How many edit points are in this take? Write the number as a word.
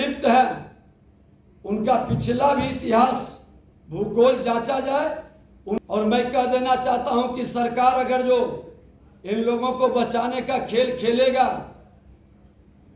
one